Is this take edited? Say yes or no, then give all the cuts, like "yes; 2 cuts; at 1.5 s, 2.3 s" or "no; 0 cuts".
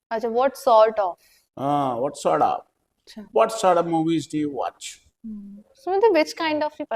no; 0 cuts